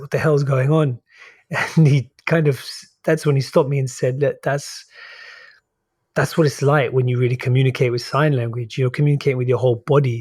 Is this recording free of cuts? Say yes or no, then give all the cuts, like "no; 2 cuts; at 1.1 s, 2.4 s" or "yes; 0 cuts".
yes; 0 cuts